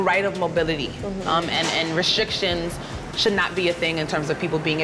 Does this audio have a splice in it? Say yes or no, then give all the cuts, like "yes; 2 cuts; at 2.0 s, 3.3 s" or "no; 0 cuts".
no; 0 cuts